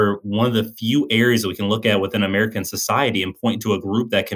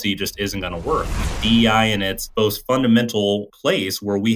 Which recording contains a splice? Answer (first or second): second